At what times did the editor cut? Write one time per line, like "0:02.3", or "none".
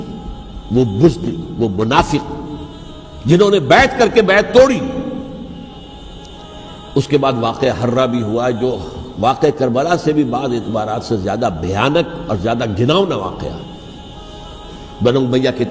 0:05.8